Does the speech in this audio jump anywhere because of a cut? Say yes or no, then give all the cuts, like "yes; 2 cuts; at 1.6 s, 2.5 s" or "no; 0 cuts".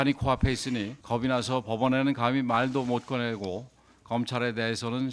yes; 1 cut; at 0.9 s